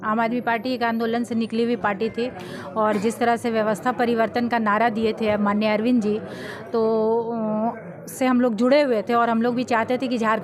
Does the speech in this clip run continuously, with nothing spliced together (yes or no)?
yes